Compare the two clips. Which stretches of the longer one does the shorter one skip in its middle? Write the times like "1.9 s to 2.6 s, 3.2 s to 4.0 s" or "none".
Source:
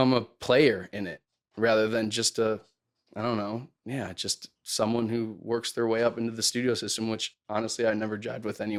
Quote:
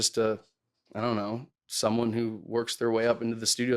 3.7 s to 4.5 s